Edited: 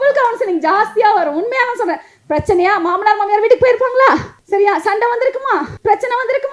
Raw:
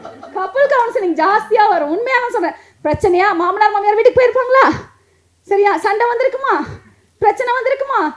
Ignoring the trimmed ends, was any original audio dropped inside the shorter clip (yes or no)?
yes